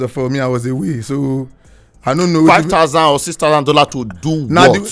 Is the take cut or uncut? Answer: uncut